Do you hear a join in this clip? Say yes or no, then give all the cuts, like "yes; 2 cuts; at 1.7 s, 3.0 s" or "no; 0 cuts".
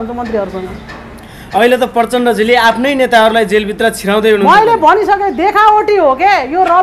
no; 0 cuts